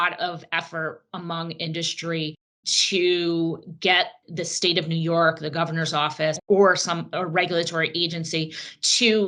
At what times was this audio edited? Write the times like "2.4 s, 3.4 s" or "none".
none